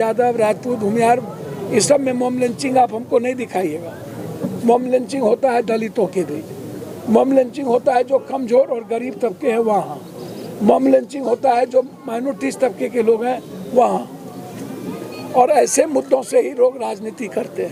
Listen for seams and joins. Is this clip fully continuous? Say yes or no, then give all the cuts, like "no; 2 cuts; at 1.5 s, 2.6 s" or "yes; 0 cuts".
yes; 0 cuts